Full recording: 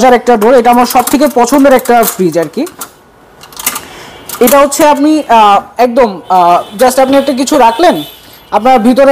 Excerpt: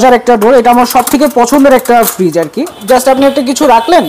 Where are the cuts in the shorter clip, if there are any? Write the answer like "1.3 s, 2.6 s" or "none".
2.8 s